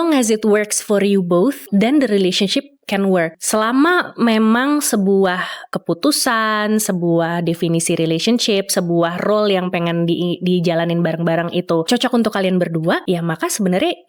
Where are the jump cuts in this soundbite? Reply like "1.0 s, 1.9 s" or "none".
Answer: 1.7 s, 3.4 s, 5.7 s, 11.8 s, 13.0 s